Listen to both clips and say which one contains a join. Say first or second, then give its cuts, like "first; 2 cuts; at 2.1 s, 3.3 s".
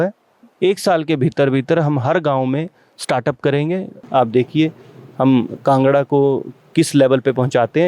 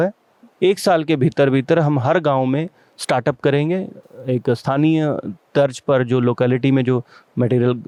first; 1 cut; at 4.1 s